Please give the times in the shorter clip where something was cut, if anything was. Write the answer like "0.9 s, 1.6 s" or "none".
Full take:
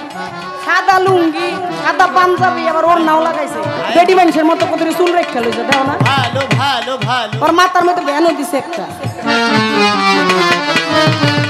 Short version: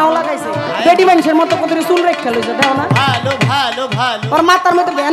none